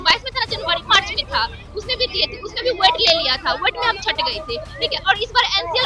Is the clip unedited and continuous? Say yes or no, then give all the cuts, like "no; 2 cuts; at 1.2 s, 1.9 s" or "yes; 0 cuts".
yes; 0 cuts